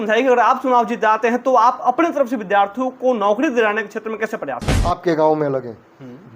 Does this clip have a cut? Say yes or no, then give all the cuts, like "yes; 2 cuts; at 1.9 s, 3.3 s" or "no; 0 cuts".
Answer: yes; 1 cut; at 4.7 s